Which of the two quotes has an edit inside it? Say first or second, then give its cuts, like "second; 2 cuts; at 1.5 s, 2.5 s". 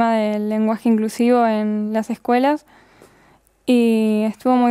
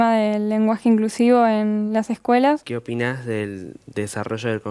second; 1 cut; at 2.7 s